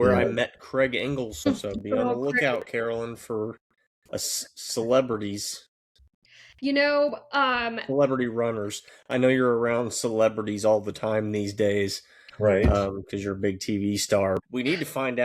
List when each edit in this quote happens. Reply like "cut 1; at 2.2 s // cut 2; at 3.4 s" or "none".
cut 1; at 1.5 s // cut 2; at 14.4 s